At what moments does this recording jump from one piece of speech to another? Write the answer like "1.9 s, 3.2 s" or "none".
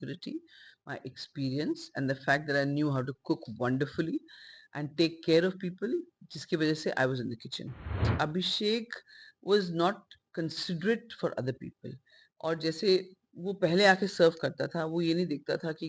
8.1 s